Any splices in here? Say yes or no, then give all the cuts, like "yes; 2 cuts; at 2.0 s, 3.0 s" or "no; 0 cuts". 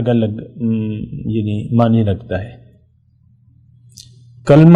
no; 0 cuts